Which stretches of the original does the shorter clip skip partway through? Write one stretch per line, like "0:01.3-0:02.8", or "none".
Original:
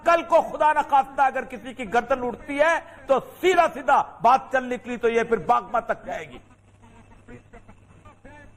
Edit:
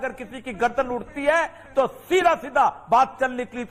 none